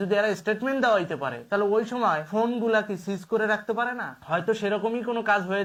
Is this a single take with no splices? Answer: yes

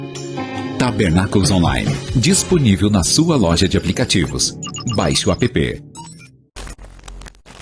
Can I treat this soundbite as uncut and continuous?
no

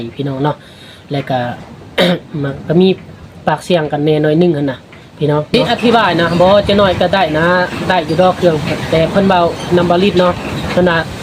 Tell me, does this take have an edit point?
yes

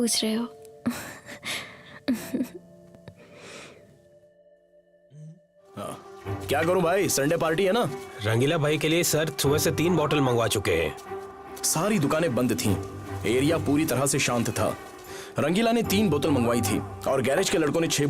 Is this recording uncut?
no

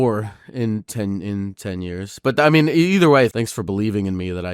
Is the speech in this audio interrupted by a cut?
yes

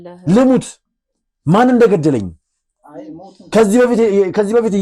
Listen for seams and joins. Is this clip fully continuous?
yes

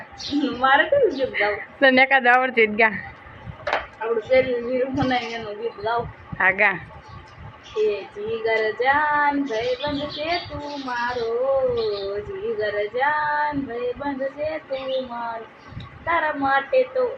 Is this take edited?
no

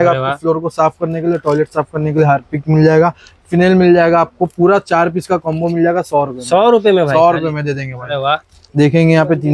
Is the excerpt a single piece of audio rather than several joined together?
no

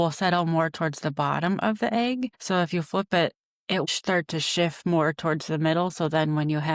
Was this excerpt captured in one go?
no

